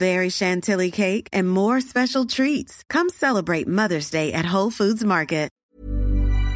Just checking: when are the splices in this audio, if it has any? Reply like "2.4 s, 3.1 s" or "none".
5.5 s